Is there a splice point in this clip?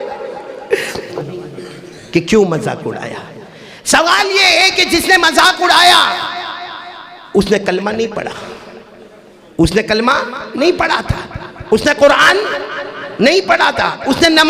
yes; 1 cut; at 1.1 s

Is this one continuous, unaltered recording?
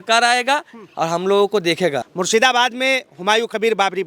no; 1 cut; at 2.0 s

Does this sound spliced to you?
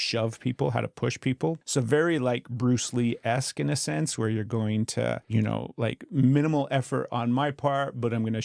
yes; 2 cuts; at 1.6 s, 5.2 s

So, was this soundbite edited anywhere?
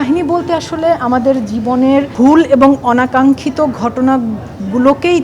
yes; 1 cut; at 2.1 s

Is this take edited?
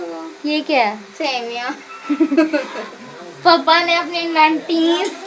no; 0 cuts

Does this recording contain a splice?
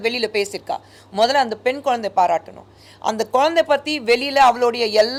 no; 0 cuts

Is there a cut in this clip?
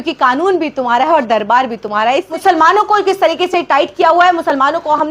yes; 1 cut; at 2.3 s

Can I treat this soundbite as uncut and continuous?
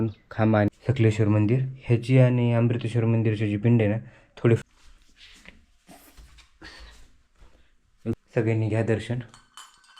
no; 3 cuts; at 0.7 s, 4.6 s, 8.1 s

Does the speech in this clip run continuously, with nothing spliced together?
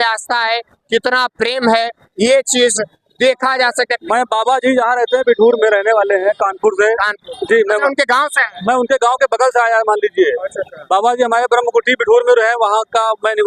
no; 1 cut; at 4.0 s

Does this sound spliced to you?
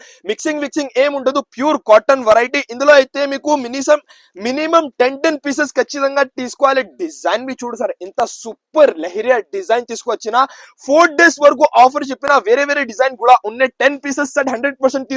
no; 0 cuts

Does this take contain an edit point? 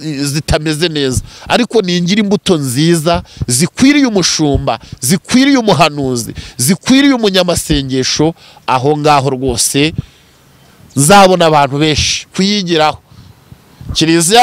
yes; 1 cut; at 12.3 s

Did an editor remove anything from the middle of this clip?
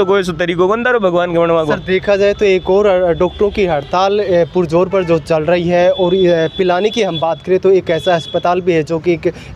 no; 0 cuts

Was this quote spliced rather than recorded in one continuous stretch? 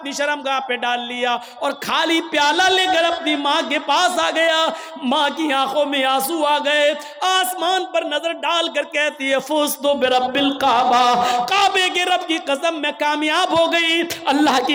no; 0 cuts

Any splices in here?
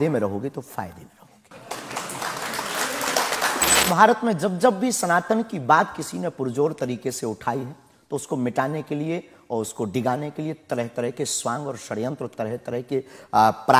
yes; 1 cut; at 3.8 s

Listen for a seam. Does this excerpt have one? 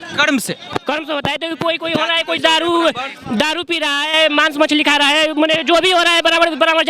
no; 0 cuts

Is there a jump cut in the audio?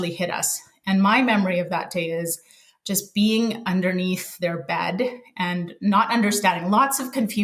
no; 0 cuts

